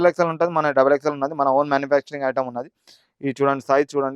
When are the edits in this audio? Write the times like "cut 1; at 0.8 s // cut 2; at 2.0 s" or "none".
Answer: none

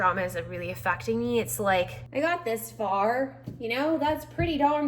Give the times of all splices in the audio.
cut 1; at 2.0 s

